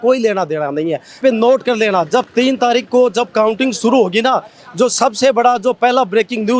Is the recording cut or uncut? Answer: cut